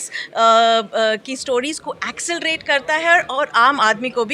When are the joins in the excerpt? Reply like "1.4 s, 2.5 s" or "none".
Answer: none